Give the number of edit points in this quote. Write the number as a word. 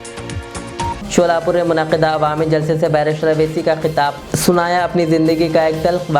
one